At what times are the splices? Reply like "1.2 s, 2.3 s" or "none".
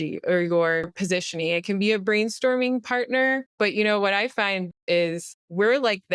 0.9 s, 3.5 s, 4.8 s

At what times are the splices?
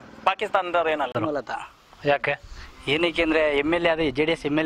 1.1 s

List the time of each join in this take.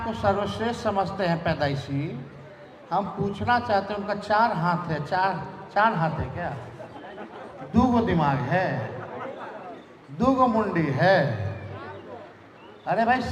none

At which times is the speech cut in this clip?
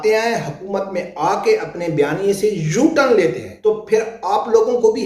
3.5 s

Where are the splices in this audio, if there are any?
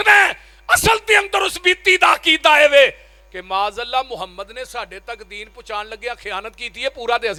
none

